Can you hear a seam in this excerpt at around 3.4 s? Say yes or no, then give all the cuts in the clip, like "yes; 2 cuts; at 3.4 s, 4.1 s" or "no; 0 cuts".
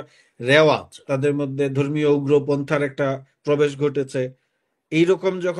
no; 1 cut; at 0.9 s